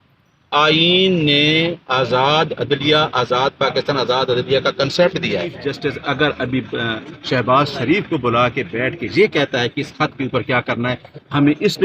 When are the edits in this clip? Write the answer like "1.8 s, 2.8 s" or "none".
5.6 s